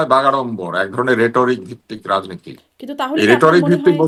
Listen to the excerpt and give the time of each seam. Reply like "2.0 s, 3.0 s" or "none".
none